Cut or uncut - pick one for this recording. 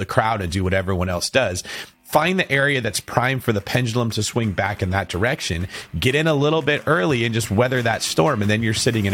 uncut